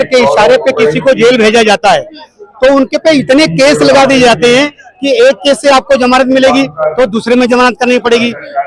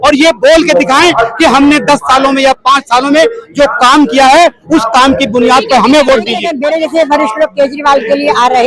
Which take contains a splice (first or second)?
second